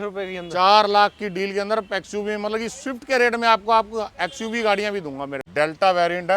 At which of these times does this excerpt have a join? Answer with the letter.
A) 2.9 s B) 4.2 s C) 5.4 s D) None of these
C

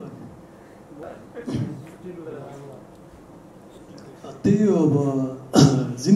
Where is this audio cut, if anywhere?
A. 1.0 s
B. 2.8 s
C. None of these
A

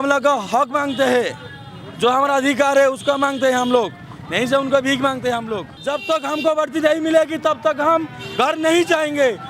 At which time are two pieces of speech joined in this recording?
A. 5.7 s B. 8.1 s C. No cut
A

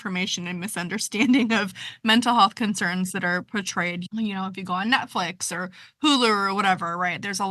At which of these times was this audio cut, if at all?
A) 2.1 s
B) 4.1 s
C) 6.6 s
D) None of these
B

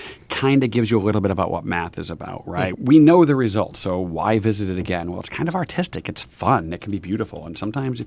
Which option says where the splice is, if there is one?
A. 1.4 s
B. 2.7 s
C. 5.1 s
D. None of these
B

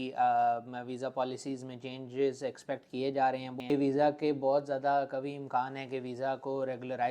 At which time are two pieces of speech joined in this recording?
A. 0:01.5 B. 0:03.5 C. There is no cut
B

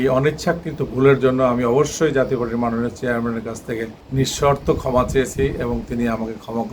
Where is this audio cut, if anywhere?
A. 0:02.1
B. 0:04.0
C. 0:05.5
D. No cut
B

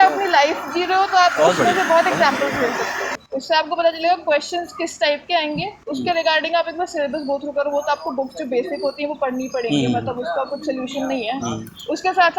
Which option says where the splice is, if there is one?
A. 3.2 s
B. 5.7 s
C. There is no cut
A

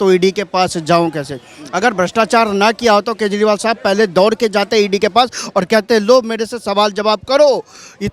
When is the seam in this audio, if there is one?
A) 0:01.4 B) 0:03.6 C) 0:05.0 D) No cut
D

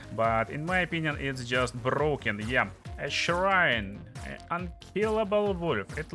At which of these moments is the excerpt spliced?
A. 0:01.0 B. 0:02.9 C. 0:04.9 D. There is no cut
B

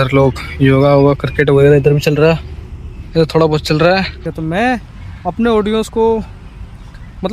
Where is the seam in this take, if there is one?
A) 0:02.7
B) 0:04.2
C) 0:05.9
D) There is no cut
B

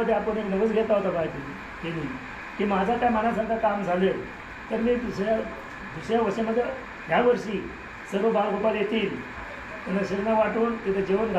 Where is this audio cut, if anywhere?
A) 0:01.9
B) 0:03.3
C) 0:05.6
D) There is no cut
D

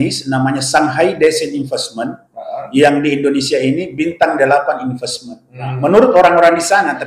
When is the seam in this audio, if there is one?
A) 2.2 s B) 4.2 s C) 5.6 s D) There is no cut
D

